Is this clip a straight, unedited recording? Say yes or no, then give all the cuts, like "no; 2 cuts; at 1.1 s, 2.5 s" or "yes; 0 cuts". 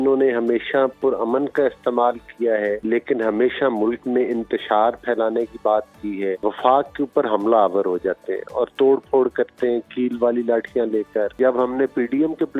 no; 3 cuts; at 2.8 s, 6.4 s, 11.4 s